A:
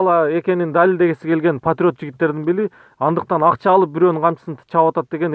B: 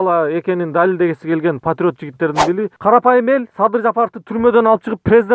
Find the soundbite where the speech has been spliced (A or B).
B